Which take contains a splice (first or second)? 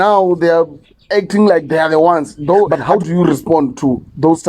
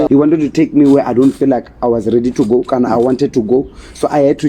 first